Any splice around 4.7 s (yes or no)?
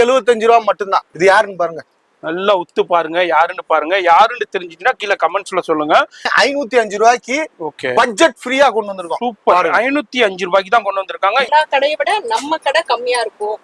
no